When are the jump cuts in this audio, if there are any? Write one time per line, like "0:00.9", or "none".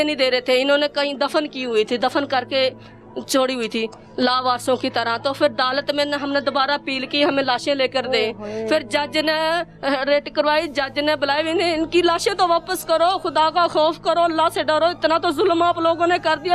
none